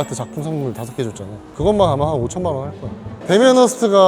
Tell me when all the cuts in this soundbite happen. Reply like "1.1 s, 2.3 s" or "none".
1.4 s, 3.1 s